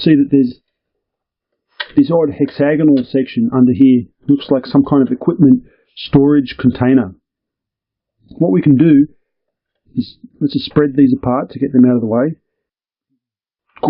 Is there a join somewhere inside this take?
no; 0 cuts

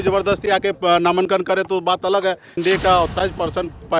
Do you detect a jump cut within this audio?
yes; 1 cut; at 2.6 s

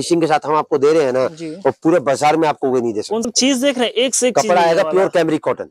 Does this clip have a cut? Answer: yes; 1 cut; at 3.2 s

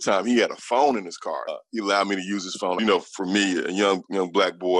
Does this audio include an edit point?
yes; 2 cuts; at 1.6 s, 2.8 s

